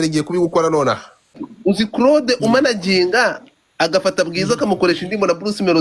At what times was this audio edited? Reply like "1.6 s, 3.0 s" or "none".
1.5 s